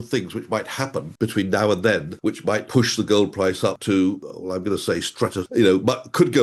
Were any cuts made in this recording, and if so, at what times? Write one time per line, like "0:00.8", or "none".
0:01.1
0:02.4
0:03.8
0:04.3
0:05.5